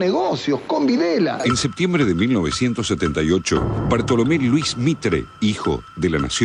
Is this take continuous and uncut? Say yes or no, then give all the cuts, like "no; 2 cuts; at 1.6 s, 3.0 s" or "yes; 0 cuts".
no; 1 cut; at 1.4 s